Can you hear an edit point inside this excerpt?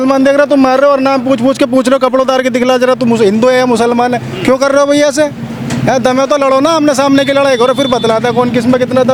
no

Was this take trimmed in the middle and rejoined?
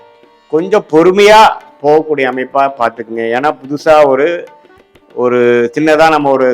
no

